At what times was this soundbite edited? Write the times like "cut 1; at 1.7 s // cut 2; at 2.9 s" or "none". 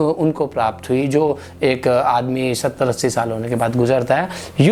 none